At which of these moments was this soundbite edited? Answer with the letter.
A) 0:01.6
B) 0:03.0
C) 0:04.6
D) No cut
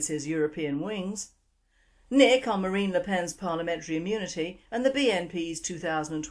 C